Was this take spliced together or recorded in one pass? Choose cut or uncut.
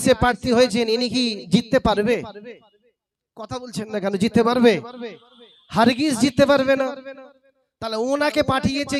uncut